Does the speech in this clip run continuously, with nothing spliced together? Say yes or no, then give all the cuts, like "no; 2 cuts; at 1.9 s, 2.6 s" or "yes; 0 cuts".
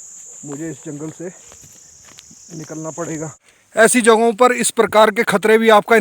no; 1 cut; at 3.3 s